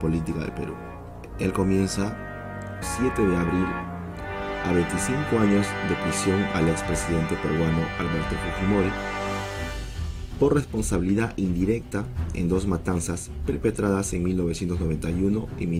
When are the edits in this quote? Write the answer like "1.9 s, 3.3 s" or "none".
none